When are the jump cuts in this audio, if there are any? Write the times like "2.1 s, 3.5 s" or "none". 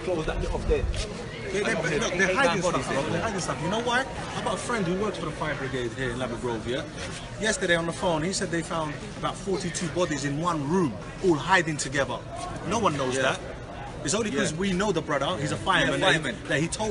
1.9 s